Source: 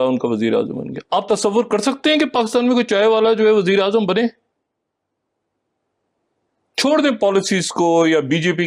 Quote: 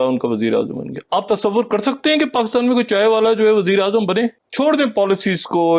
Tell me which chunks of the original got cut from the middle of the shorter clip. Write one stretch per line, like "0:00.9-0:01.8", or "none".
0:04.4-0:06.7